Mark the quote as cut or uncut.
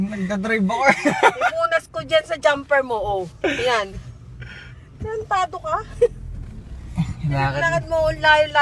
uncut